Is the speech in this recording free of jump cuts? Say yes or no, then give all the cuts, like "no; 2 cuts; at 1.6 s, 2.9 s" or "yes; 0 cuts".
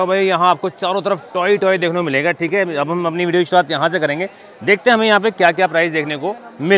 yes; 0 cuts